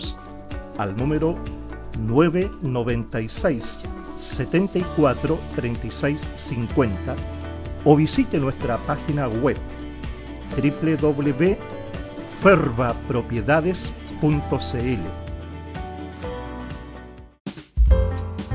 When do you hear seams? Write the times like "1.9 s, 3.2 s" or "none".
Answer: 17.2 s